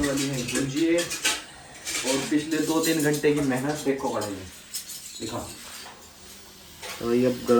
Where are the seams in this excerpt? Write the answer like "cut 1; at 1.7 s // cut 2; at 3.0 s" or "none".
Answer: none